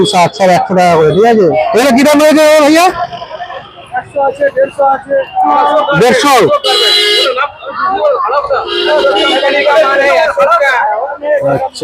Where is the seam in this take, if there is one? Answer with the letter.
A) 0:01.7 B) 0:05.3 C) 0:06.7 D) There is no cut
A